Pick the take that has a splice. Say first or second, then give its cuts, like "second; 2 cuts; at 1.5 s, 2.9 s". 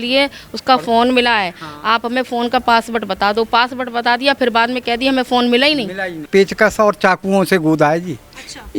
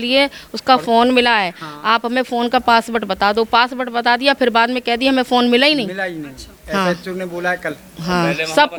first; 1 cut; at 6.2 s